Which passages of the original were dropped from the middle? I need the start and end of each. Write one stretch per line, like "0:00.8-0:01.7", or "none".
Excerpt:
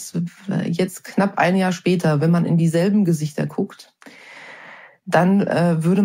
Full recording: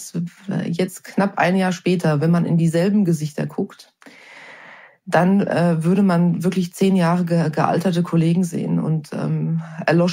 none